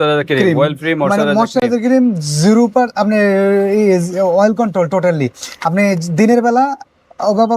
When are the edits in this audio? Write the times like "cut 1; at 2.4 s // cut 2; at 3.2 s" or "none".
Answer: none